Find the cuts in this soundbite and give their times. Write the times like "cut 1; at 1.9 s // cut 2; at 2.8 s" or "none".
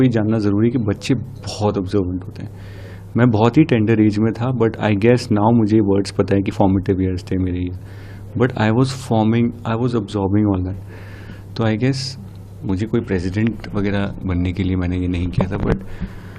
none